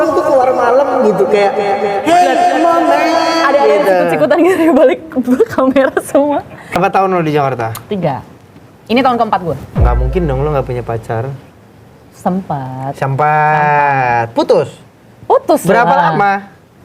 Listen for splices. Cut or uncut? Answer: cut